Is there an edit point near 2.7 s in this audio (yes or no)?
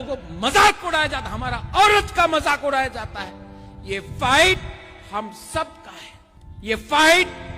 no